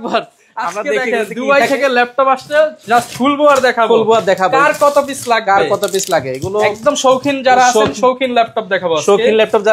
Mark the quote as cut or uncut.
uncut